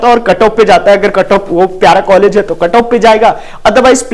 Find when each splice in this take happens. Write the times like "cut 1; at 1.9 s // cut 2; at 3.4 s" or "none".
none